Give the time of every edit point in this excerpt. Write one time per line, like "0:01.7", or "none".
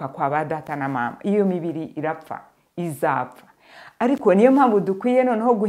none